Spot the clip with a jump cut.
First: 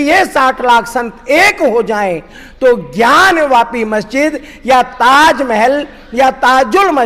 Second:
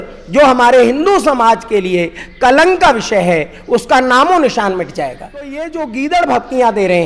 second; 1 cut; at 5.7 s

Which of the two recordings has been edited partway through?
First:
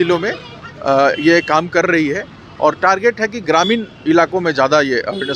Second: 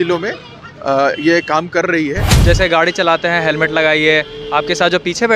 second; 1 cut; at 2.4 s

